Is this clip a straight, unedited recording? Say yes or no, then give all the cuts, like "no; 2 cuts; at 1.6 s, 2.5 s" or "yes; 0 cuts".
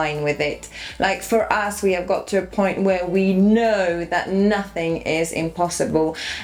yes; 0 cuts